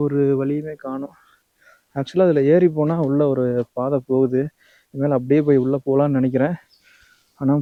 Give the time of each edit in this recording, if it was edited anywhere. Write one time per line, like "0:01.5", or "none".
none